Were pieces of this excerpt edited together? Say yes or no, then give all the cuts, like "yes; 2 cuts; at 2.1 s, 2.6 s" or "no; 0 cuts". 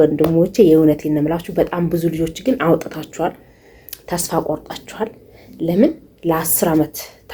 no; 0 cuts